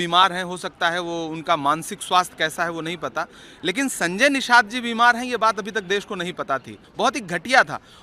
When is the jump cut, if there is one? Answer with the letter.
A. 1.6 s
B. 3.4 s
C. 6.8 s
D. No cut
C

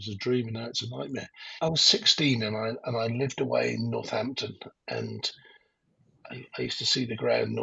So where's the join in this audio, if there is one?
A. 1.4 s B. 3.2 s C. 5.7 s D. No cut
A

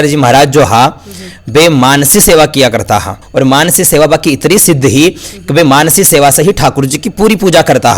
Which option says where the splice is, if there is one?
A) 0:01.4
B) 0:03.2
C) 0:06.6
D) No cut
B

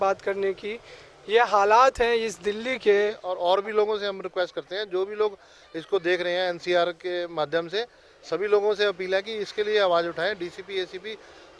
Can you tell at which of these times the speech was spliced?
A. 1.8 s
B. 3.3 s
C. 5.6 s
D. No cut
B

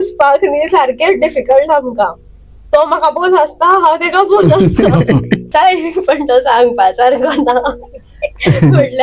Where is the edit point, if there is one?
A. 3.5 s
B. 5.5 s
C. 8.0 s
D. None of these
B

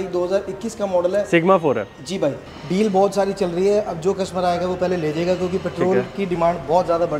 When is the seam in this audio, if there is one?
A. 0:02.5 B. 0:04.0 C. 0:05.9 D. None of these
A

